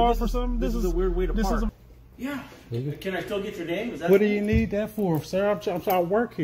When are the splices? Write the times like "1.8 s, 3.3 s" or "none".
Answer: 1.7 s